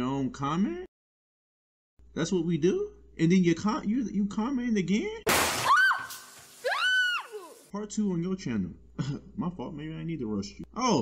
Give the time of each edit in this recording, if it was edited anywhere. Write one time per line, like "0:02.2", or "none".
none